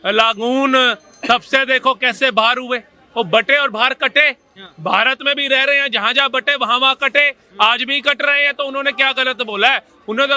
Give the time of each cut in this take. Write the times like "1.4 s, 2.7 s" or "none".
none